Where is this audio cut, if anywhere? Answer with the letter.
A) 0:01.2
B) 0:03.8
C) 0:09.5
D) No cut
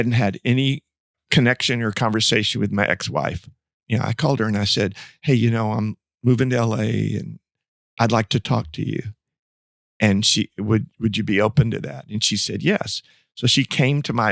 A